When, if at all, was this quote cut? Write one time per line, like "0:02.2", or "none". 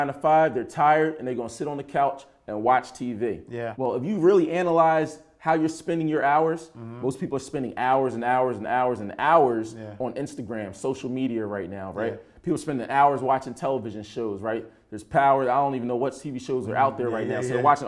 0:03.6